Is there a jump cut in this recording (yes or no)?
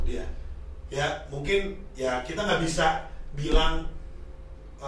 no